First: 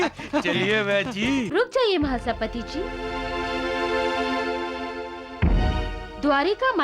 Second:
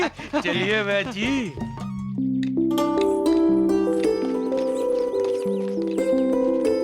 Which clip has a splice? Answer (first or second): first